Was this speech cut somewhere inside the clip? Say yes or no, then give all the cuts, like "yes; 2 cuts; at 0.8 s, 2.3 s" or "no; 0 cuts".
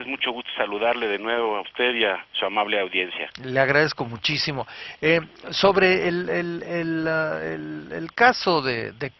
no; 0 cuts